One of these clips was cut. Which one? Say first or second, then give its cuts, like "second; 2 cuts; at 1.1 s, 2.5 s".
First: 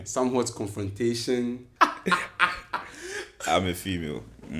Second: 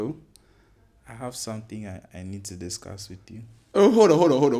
first; 1 cut; at 1.7 s